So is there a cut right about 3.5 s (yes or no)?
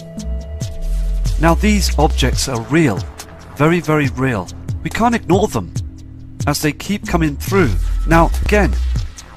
no